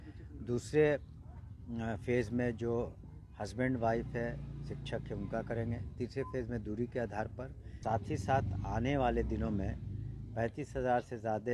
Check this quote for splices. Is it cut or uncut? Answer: cut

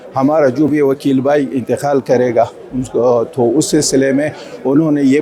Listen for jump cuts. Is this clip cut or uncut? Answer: uncut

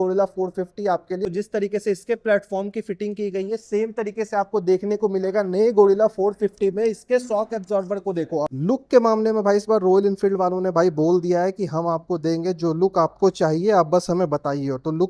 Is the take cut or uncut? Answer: cut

